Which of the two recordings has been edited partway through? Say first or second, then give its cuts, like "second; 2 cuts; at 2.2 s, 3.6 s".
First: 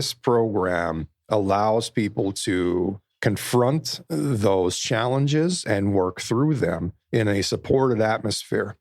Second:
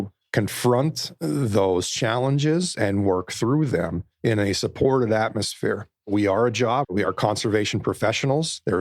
second; 1 cut; at 6.9 s